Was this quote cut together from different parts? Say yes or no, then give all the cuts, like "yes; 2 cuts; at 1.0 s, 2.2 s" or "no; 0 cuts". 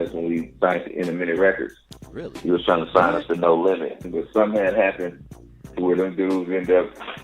yes; 1 cut; at 4.1 s